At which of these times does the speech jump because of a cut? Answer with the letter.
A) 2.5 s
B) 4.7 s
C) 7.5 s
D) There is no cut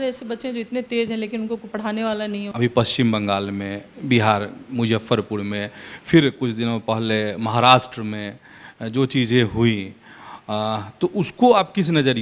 A